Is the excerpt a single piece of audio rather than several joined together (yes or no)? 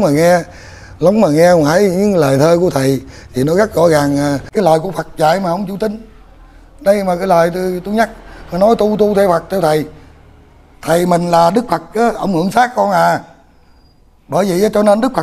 no